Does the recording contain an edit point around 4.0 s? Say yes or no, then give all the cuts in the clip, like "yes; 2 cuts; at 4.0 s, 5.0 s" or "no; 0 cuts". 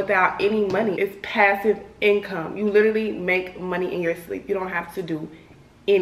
no; 1 cut; at 1.0 s